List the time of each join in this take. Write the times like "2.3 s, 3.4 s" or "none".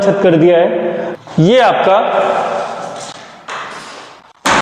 1.0 s